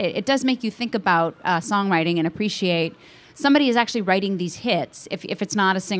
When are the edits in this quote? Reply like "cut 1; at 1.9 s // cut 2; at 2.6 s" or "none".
none